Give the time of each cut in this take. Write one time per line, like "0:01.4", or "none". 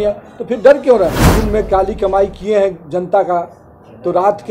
0:01.3